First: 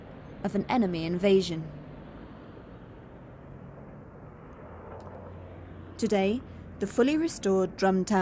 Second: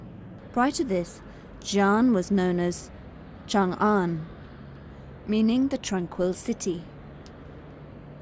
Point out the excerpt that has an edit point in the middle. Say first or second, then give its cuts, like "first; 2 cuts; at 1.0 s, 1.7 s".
first; 1 cut; at 6.8 s